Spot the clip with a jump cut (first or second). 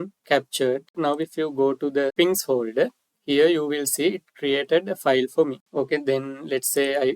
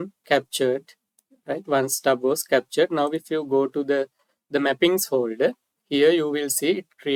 first